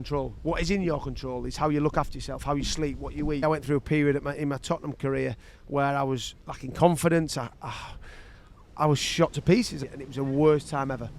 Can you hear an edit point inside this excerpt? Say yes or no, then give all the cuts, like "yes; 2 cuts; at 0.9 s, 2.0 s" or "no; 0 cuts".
yes; 2 cuts; at 3.4 s, 9.8 s